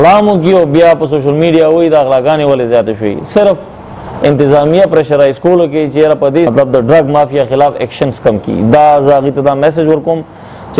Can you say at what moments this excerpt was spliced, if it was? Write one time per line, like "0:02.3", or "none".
0:06.5